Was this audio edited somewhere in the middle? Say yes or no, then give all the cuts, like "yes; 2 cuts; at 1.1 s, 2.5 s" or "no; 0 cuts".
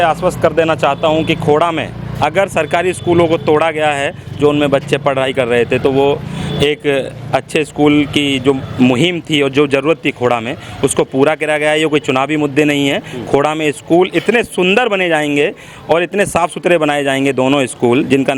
no; 0 cuts